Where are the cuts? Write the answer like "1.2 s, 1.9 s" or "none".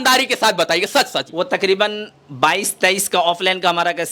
1.2 s